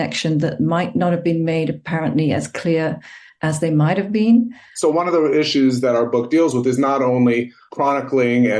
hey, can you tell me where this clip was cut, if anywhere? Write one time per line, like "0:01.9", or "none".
0:04.6